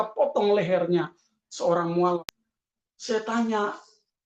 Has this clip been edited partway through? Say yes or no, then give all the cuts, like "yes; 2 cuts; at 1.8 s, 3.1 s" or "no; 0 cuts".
yes; 1 cut; at 2.3 s